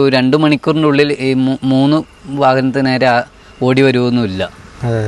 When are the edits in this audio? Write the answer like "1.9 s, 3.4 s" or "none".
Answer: none